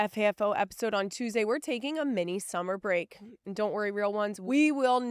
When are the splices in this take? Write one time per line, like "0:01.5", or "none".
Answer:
none

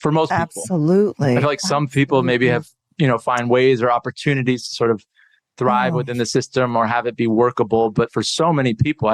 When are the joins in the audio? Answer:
none

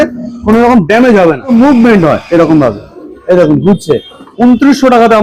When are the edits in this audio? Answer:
0:01.5
0:04.3

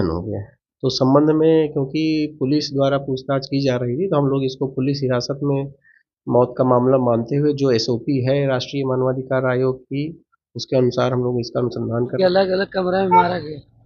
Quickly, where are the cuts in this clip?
0:12.2

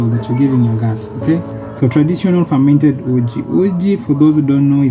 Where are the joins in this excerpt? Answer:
0:01.5

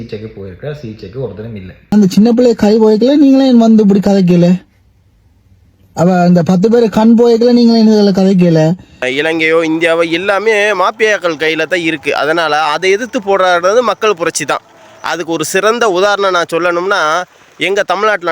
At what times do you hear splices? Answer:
0:01.9
0:09.0

